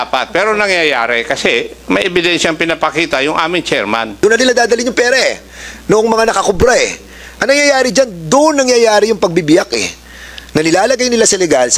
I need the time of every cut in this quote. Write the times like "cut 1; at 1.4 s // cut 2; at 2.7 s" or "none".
cut 1; at 4.2 s